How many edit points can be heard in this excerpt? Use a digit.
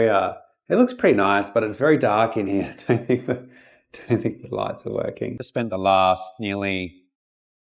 1